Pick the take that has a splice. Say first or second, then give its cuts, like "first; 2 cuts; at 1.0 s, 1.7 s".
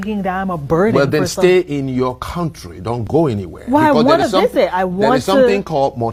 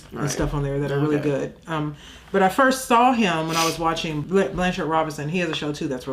second; 1 cut; at 4.2 s